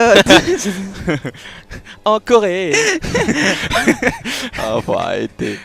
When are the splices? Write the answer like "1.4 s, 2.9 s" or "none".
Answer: 2.3 s